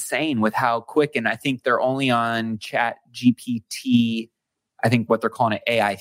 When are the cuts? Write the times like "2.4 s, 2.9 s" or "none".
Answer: none